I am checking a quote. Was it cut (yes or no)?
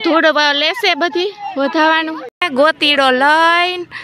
yes